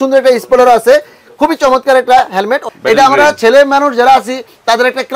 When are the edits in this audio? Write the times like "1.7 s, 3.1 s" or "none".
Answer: 2.7 s